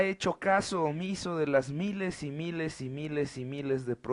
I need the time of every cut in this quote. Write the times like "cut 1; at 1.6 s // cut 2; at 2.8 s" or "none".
cut 1; at 2.6 s